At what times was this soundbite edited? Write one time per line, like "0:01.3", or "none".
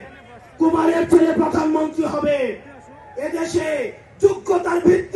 none